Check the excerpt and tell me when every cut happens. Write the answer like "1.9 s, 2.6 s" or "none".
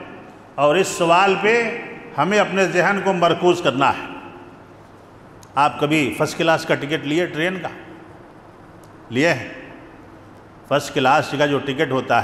none